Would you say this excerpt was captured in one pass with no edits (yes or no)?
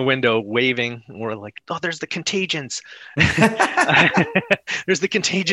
yes